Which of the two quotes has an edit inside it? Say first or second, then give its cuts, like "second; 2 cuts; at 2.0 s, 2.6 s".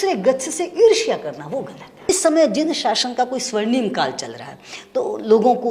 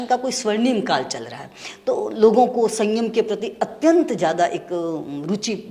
first; 1 cut; at 1.8 s